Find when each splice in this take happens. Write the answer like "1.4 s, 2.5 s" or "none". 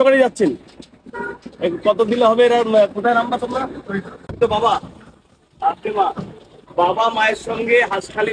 4.3 s